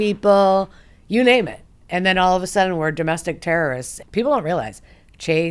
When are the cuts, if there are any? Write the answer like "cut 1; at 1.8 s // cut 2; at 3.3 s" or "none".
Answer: cut 1; at 3.9 s